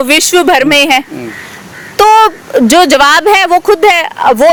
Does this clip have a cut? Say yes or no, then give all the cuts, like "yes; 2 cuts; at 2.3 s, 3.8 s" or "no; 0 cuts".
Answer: no; 0 cuts